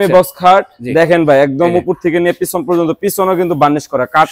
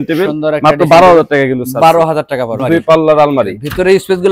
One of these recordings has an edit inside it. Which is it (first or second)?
second